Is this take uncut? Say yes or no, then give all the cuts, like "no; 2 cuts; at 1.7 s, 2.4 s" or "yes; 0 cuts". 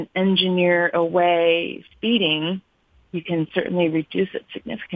yes; 0 cuts